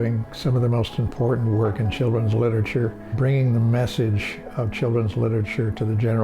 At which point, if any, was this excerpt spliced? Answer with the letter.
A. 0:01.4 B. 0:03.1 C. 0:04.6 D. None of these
B